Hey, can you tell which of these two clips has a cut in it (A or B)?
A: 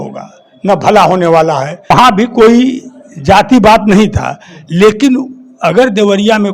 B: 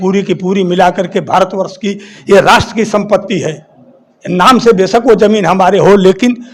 A